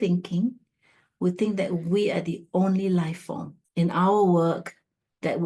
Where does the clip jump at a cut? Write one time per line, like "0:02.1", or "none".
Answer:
0:03.7